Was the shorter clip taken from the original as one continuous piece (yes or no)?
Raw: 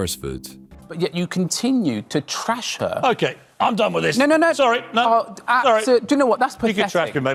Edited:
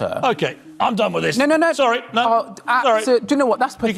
yes